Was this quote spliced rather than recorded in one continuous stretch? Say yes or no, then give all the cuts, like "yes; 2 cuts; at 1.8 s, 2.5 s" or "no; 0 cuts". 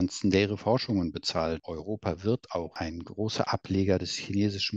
yes; 2 cuts; at 1.6 s, 2.7 s